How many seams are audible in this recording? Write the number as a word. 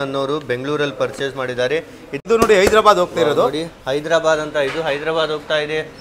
one